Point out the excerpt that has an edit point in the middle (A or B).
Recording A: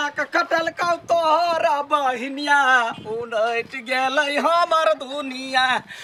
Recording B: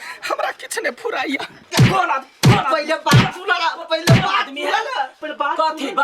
B